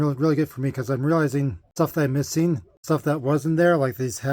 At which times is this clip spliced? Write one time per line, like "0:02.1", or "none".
0:01.6
0:02.8